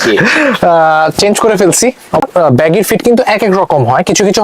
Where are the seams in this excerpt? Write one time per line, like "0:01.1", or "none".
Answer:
0:02.2